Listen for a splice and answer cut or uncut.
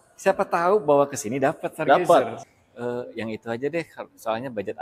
cut